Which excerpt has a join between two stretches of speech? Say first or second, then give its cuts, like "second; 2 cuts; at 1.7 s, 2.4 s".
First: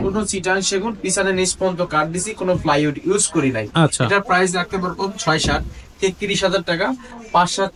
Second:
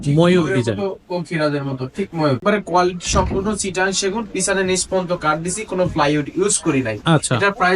second; 1 cut; at 2.4 s